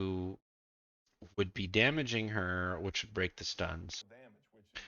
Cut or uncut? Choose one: cut